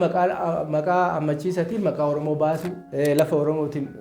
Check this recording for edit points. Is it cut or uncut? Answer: cut